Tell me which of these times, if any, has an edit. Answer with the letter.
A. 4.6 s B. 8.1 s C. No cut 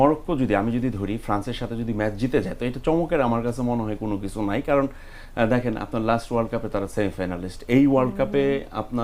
C